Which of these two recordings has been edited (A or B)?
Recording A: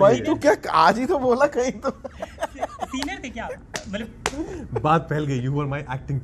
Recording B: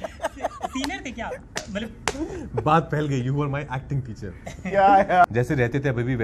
B